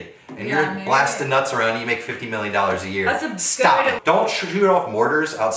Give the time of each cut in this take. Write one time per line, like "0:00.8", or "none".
0:04.0